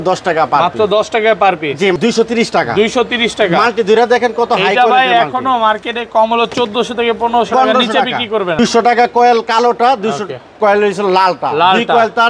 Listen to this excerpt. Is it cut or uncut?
cut